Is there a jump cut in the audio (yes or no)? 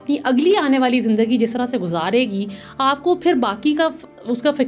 no